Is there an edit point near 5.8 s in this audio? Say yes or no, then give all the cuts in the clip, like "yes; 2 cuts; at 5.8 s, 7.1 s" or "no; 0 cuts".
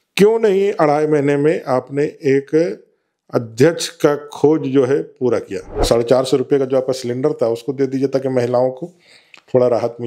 yes; 1 cut; at 5.8 s